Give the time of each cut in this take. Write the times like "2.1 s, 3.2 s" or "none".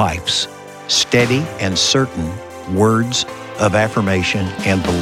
none